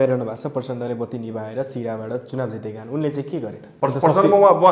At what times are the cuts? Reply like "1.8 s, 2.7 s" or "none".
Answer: 3.6 s

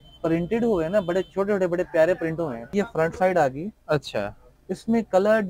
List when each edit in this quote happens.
2.7 s

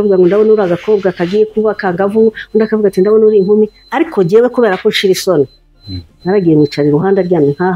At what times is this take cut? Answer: none

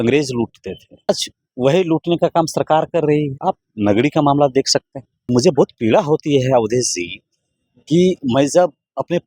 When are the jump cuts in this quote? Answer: 1.1 s, 3.3 s, 5.3 s

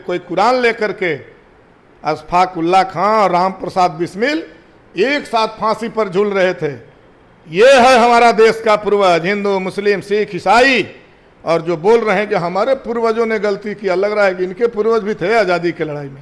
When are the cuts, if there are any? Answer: none

